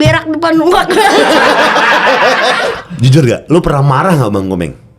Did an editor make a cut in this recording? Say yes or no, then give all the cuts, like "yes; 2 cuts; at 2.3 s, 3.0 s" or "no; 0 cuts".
yes; 1 cut; at 2.7 s